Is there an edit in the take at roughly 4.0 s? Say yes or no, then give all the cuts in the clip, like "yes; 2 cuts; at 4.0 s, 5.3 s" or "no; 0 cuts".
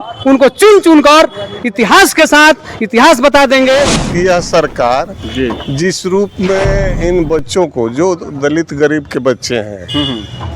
yes; 1 cut; at 4.0 s